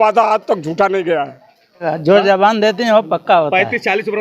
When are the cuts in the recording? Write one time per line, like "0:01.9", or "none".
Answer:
0:01.9